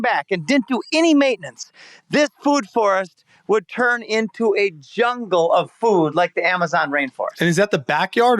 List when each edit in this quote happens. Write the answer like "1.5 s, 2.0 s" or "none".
none